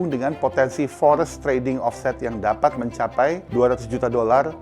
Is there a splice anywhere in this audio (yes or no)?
yes